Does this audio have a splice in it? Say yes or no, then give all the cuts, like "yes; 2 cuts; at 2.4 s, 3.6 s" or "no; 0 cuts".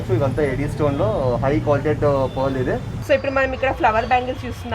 yes; 1 cut; at 2.9 s